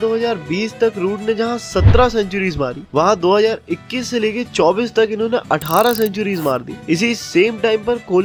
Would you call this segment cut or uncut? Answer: uncut